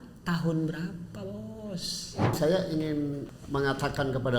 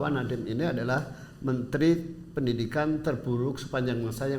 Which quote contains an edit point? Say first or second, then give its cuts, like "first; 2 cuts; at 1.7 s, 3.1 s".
first; 2 cuts; at 2.4 s, 3.3 s